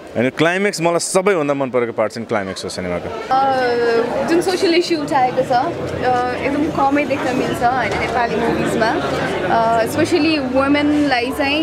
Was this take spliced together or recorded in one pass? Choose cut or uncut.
cut